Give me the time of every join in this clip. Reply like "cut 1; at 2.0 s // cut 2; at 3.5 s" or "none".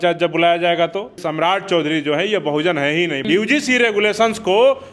cut 1; at 1.2 s // cut 2; at 3.2 s

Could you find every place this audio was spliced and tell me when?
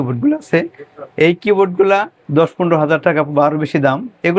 cut 1; at 2.2 s

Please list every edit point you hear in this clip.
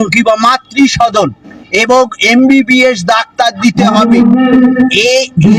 none

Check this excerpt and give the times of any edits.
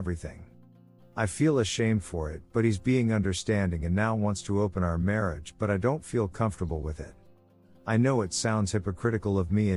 cut 1; at 7.3 s

